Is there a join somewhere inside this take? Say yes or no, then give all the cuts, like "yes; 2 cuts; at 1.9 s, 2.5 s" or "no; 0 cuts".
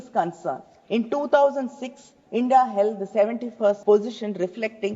yes; 1 cut; at 3.8 s